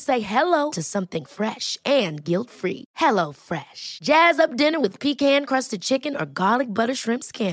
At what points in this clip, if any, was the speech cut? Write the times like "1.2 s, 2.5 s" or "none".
none